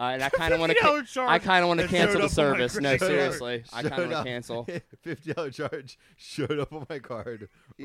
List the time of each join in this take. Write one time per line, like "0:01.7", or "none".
none